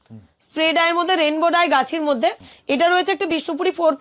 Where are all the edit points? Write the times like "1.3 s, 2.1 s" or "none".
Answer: 2.5 s